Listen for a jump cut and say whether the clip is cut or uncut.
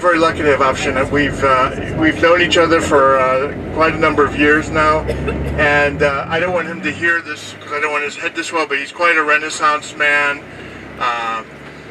uncut